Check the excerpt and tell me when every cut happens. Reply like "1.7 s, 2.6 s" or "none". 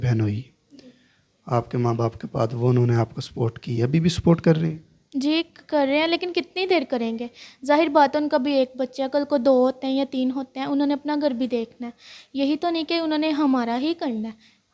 none